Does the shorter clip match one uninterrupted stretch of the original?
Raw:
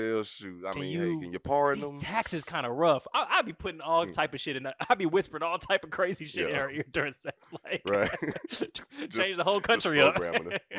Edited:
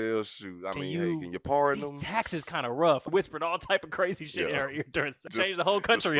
no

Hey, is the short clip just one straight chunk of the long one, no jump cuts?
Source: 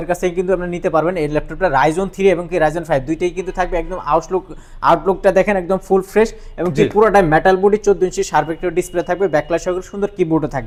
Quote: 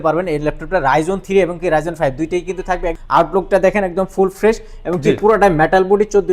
no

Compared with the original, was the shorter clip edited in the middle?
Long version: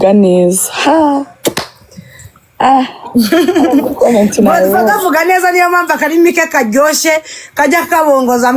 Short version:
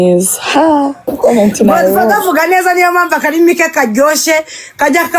yes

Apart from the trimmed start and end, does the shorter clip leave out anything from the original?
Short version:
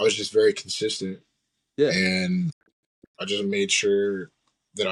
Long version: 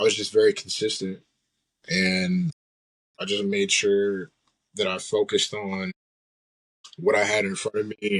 no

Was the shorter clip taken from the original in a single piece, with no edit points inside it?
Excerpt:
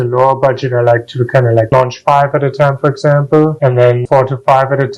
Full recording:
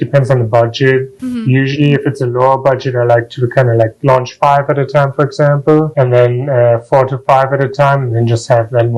no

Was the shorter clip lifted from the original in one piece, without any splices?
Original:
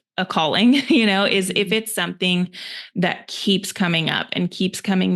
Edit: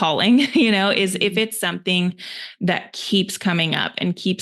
yes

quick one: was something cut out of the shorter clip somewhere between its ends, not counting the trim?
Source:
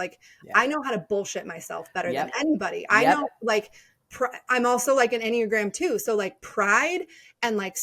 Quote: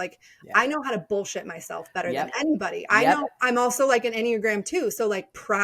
yes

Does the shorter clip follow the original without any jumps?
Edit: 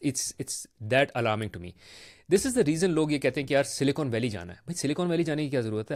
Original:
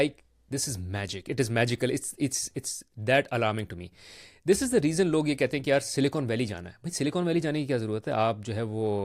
yes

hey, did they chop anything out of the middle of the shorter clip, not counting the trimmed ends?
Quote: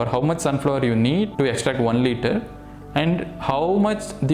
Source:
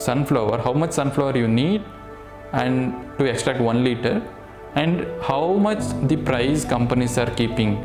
yes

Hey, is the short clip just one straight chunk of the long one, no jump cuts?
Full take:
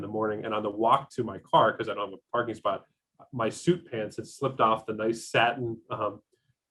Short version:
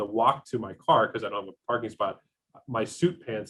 yes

